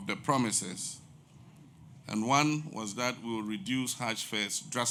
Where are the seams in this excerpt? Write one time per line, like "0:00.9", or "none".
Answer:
none